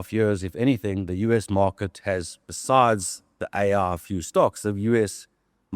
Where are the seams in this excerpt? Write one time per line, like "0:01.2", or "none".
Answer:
none